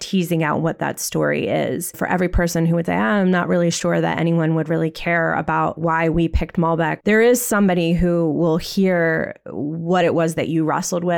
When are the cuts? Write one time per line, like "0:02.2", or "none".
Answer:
0:02.0
0:05.8
0:07.0